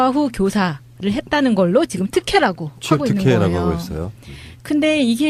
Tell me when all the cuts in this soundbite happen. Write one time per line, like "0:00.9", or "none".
none